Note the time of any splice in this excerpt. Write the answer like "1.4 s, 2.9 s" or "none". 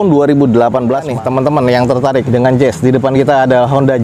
1.1 s